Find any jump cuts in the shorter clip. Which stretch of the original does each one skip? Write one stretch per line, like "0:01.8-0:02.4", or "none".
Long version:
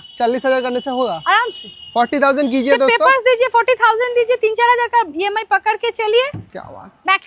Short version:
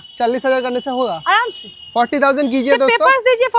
none